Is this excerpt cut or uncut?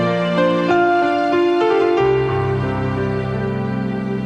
uncut